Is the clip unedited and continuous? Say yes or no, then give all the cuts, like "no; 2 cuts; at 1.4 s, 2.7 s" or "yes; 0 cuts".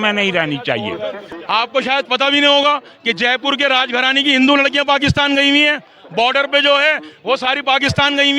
no; 1 cut; at 1.3 s